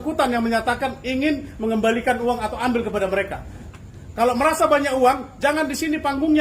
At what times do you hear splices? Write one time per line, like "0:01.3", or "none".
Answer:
0:03.6